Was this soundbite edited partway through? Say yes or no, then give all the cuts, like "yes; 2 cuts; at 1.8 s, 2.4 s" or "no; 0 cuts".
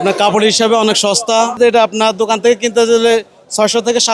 yes; 1 cut; at 1.6 s